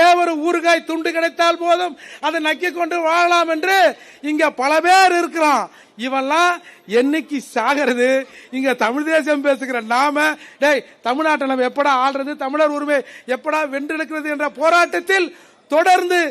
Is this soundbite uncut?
yes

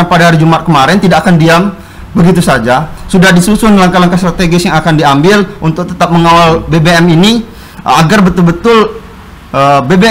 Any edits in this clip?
no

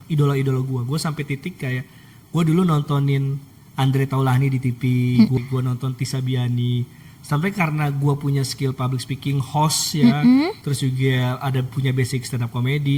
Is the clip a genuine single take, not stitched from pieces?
yes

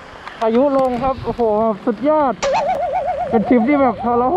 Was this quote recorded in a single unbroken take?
yes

